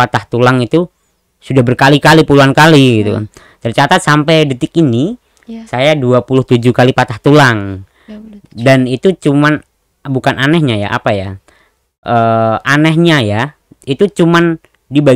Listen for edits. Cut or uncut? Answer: uncut